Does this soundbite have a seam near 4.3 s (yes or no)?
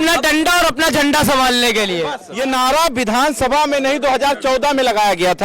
no